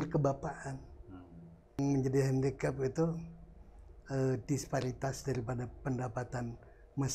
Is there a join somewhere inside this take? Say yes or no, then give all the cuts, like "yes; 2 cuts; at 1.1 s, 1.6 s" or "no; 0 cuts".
yes; 1 cut; at 1.8 s